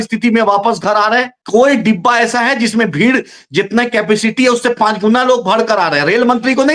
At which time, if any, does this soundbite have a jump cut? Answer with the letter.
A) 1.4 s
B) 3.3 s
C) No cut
A